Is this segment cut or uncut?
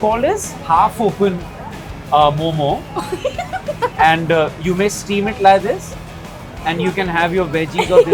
uncut